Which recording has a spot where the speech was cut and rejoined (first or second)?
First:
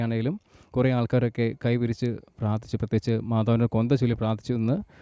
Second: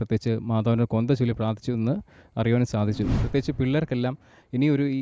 second